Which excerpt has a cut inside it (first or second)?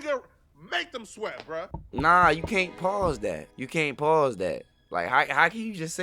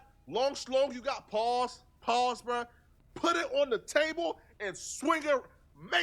first